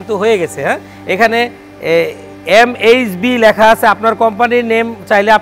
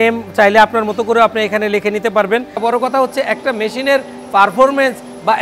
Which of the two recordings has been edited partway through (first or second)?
second